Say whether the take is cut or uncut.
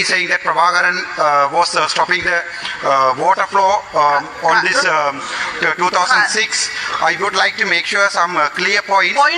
uncut